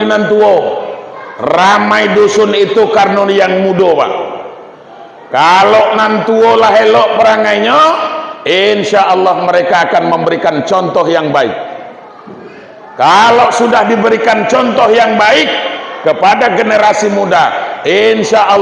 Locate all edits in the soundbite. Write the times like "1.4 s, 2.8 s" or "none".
none

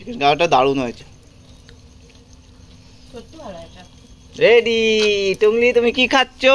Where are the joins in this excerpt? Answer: none

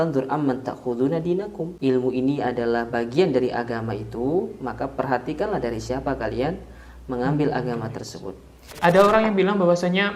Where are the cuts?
1.6 s, 8.7 s

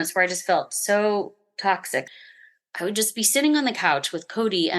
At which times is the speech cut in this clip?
2.1 s

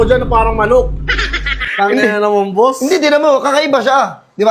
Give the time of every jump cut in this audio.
none

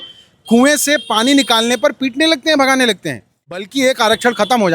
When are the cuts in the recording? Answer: 3.6 s

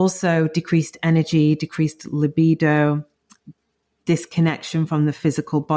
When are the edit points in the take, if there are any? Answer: none

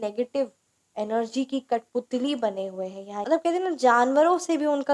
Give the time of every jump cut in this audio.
3.2 s

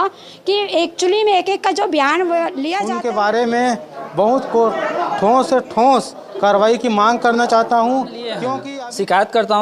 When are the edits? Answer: 2.7 s, 8.6 s

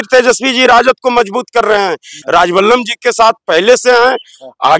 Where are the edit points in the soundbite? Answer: 2.1 s

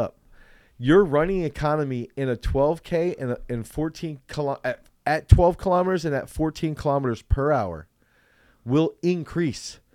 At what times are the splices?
none

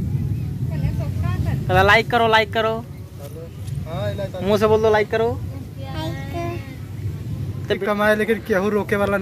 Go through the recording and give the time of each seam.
7.8 s

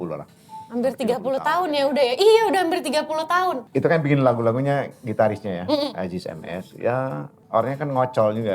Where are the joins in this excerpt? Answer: 3.7 s

